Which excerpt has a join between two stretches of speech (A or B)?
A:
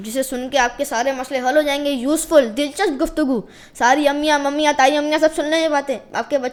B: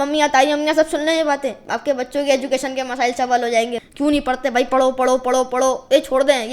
B